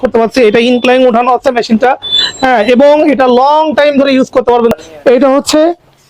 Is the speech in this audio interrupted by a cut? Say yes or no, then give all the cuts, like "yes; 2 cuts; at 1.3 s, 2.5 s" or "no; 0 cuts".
yes; 1 cut; at 4.9 s